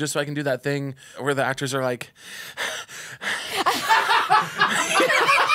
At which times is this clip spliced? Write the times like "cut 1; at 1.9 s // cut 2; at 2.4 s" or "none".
cut 1; at 1.2 s